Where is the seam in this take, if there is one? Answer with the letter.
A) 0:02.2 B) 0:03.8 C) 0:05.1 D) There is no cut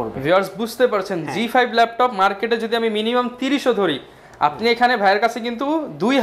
D